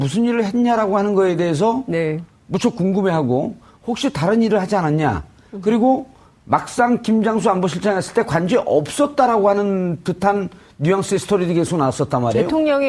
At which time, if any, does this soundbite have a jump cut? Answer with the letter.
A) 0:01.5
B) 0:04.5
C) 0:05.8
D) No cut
A